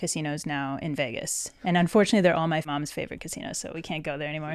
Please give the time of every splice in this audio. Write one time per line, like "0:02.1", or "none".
0:02.7

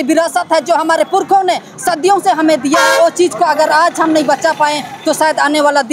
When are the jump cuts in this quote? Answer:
none

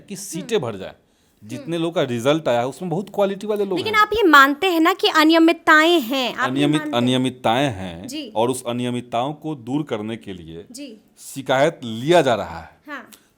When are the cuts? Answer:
none

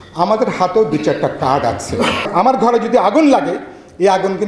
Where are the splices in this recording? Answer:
0:02.3

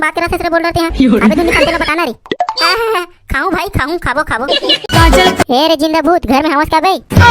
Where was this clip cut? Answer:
0:04.8

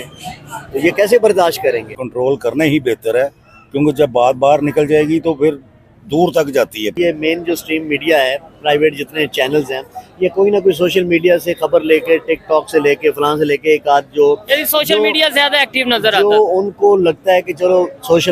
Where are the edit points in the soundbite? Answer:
0:02.0
0:07.0

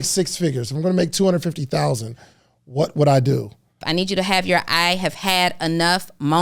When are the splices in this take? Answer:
0:03.8

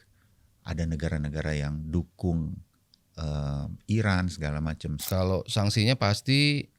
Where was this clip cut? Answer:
0:05.0

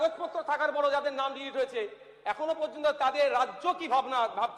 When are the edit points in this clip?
none

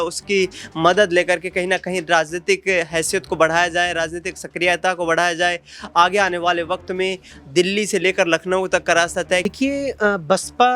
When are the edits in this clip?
0:09.5

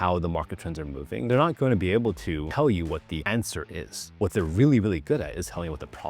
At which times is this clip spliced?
0:01.3
0:02.5
0:03.2

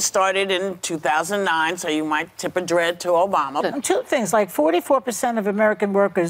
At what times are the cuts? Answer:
0:03.7

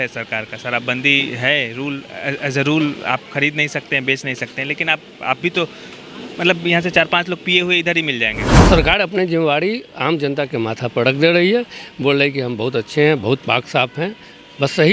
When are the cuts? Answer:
0:08.5

